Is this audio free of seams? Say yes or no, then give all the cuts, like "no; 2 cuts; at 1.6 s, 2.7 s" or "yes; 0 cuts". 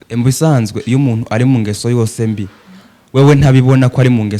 yes; 0 cuts